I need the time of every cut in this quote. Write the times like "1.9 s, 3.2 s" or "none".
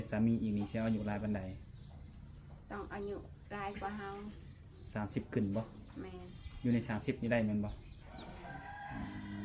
none